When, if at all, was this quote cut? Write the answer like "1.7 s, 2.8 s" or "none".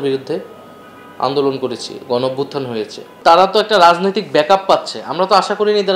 3.0 s

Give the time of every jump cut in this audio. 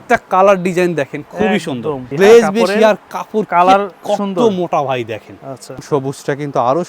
2.0 s, 5.8 s

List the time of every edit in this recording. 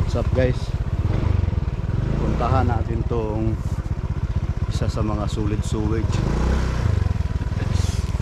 none

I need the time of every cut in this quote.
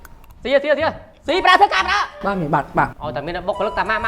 3.0 s

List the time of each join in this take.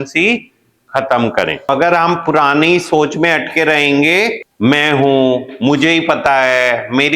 4.4 s

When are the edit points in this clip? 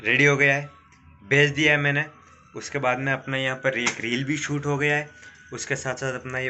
none

